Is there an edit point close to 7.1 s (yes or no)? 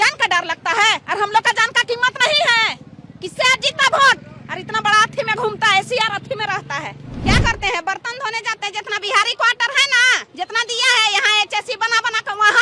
yes